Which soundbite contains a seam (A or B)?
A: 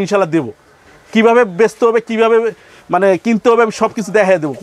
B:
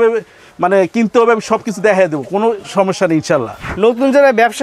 B